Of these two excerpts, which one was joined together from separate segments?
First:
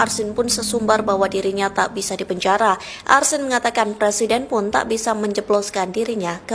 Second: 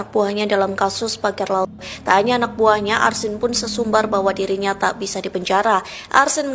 second; 1 cut; at 1.7 s

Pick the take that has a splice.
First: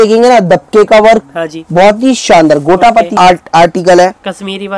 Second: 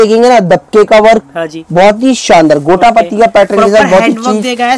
first; 1 cut; at 3.2 s

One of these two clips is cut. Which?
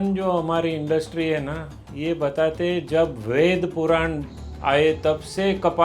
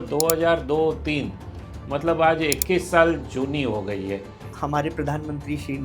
second; 1 cut; at 4.5 s

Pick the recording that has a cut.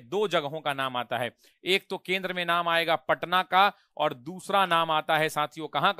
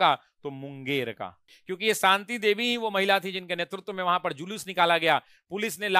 second; 1 cut; at 1.5 s

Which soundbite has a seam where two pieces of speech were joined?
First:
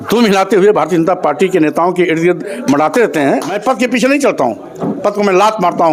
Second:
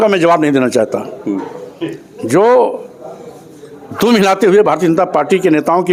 first; 1 cut; at 3.6 s

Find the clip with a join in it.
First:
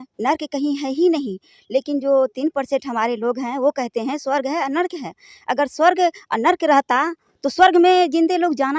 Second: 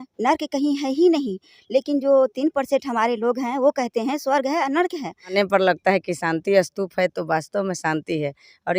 second; 1 cut; at 5.3 s

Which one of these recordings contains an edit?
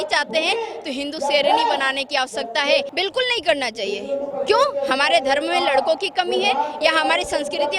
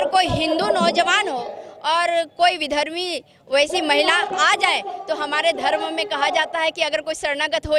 first; 1 cut; at 2.9 s

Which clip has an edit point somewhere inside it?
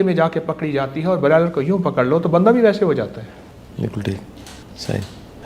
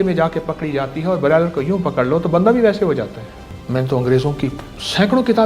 second; 1 cut; at 3.5 s

